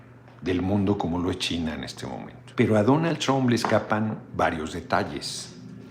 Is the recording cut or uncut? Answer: cut